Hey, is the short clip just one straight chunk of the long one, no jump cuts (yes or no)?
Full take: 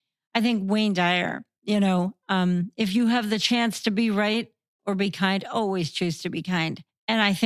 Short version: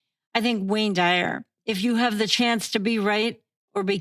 no